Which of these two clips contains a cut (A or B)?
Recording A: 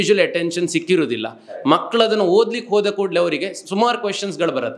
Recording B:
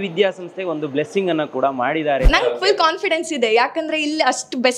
B